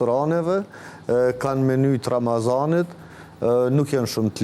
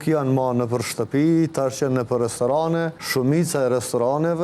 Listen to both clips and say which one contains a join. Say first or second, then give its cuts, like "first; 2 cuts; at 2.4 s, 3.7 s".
second; 1 cut; at 3.0 s